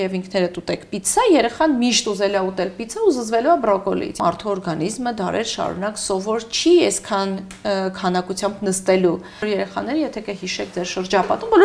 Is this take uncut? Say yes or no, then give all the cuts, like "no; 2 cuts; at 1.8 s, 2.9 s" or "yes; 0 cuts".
no; 2 cuts; at 4.2 s, 9.4 s